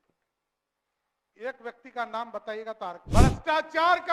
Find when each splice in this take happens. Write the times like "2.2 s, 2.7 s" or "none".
3.0 s